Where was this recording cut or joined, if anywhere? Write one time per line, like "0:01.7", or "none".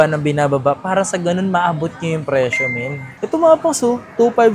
0:03.0